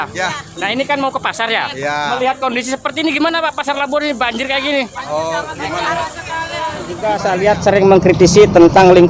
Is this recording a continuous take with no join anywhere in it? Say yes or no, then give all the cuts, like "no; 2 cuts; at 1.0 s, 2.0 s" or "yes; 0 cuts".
no; 1 cut; at 7.1 s